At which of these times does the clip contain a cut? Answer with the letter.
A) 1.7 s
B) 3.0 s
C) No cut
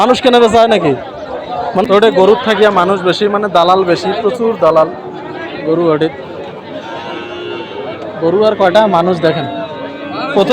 A